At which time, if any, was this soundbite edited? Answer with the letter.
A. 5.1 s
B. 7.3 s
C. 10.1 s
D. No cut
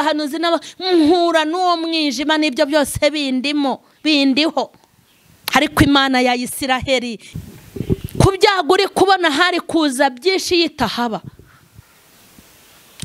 B